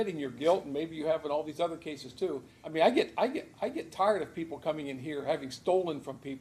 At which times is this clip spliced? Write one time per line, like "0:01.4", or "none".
0:02.6